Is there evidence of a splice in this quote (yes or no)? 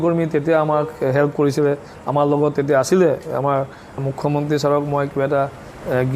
yes